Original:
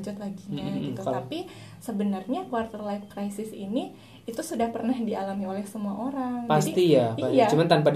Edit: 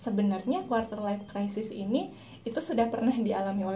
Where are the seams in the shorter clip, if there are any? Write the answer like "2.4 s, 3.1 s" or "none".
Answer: none